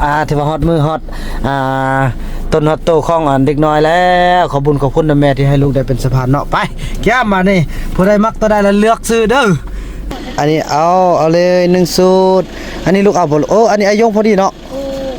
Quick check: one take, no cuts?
no; 1 cut; at 10.1 s

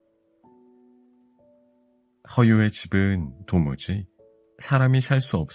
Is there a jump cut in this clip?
yes; 1 cut; at 2.1 s

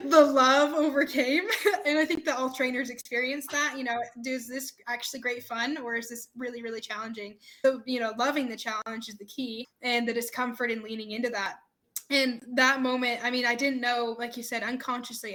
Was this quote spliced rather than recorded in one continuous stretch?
no; 0 cuts

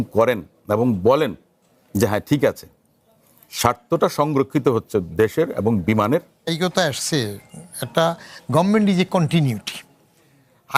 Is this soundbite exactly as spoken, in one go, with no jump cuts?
no; 1 cut; at 6.5 s

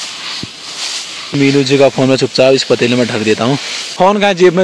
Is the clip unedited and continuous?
yes; 0 cuts

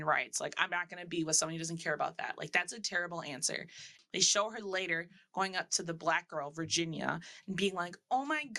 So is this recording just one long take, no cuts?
no; 1 cut; at 3.9 s

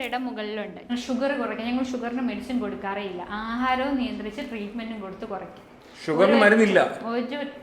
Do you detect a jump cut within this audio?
yes; 1 cut; at 0.9 s

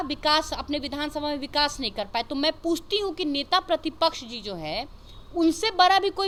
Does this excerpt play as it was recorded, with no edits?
yes; 0 cuts

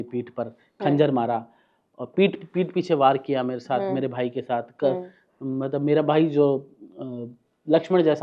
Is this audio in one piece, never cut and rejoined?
yes; 0 cuts

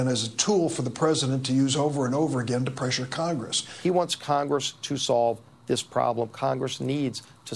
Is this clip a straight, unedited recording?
no; 1 cut; at 3.6 s

